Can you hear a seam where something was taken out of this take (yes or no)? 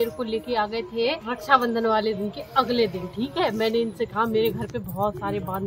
yes